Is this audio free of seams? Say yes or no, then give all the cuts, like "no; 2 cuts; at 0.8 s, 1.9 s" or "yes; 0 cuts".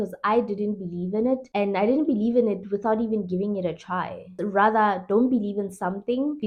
yes; 0 cuts